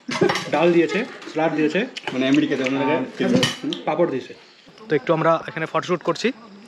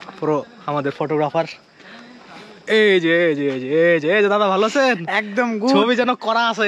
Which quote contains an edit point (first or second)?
first